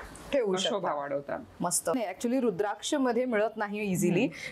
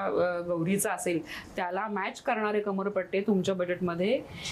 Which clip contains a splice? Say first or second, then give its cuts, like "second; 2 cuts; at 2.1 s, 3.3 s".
first; 1 cut; at 1.9 s